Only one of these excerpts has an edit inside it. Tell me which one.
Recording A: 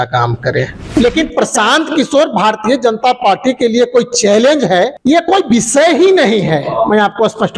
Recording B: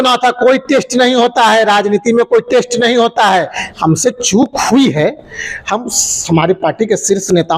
A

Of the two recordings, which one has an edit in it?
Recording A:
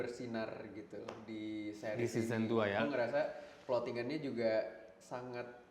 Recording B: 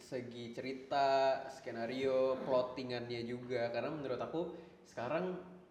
A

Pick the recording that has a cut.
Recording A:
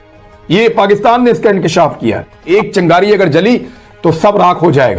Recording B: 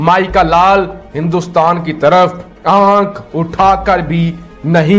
A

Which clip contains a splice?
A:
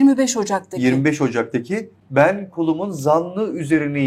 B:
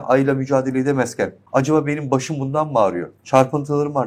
B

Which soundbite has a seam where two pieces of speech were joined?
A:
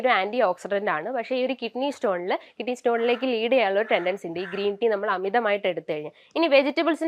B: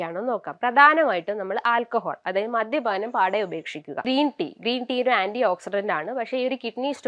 B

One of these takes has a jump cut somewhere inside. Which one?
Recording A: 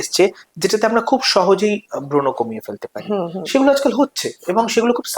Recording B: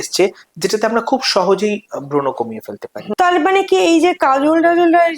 B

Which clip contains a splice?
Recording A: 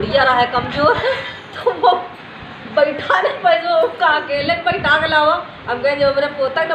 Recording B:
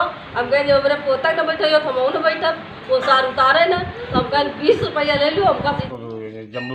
B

